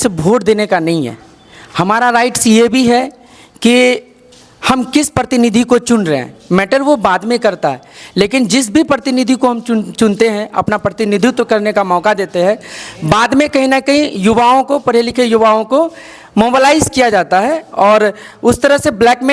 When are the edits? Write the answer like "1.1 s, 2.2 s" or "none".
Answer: none